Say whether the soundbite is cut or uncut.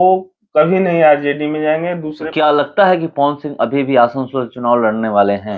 cut